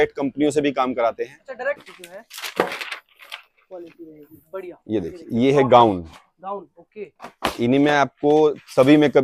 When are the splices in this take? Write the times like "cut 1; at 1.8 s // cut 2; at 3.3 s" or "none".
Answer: cut 1; at 1.8 s